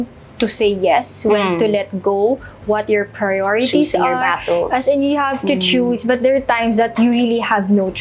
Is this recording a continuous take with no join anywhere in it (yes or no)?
yes